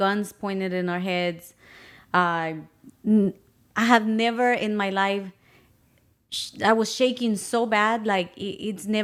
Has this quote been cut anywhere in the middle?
no; 0 cuts

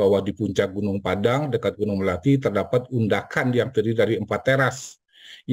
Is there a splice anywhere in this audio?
no; 0 cuts

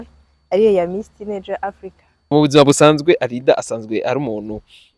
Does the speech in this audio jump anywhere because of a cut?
yes; 1 cut; at 2.3 s

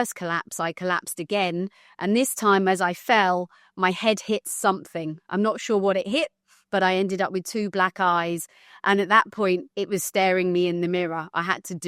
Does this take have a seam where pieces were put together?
no; 0 cuts

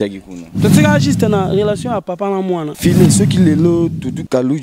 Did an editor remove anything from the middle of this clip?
yes; 1 cut; at 2.7 s

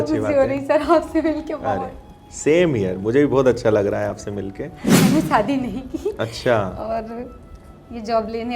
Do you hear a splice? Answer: yes; 1 cut; at 4.9 s

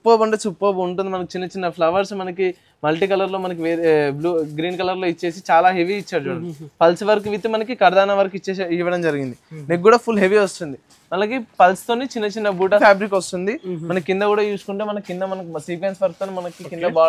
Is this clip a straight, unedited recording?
no; 1 cut; at 12.8 s

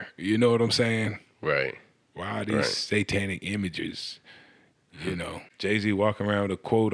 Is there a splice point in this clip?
yes; 1 cut; at 5.5 s

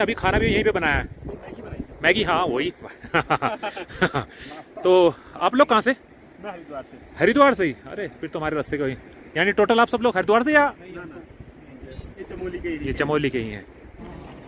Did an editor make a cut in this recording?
no; 0 cuts

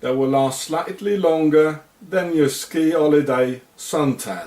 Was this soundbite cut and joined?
yes; 1 cut; at 1.9 s

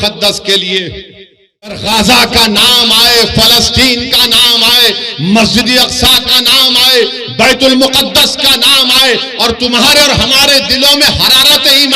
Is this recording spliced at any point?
yes; 1 cut; at 1.8 s

